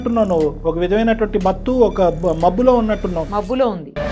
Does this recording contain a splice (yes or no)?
no